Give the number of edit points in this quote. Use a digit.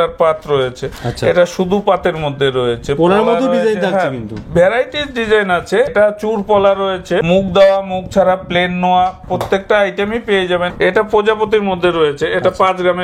3